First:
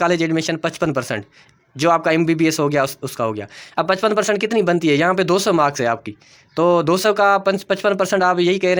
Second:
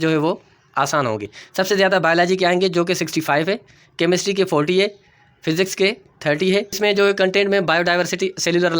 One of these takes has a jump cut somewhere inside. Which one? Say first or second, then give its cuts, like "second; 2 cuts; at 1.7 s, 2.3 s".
second; 2 cuts; at 1.4 s, 6.8 s